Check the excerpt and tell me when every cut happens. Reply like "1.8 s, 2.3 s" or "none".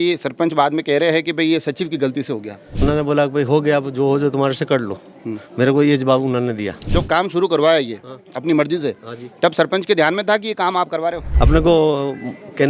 2.6 s, 6.9 s, 11.2 s